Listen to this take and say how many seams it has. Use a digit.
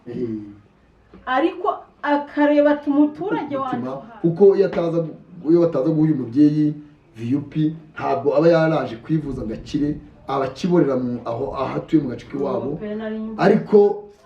1